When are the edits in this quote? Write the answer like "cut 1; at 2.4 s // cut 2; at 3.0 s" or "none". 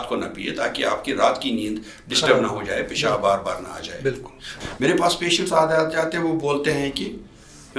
cut 1; at 4.6 s